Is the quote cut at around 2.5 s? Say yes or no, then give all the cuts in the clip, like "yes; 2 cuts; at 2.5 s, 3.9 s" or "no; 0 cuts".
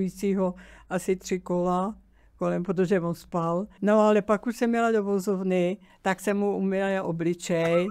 no; 2 cuts; at 3.7 s, 5.9 s